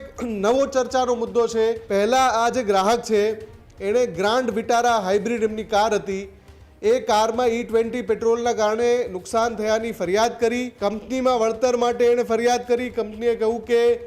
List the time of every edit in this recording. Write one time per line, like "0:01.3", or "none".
0:01.8
0:10.7